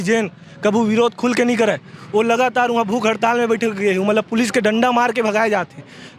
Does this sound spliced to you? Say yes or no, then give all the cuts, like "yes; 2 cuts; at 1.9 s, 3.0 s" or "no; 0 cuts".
no; 0 cuts